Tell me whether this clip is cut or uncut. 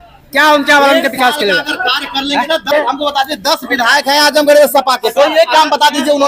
cut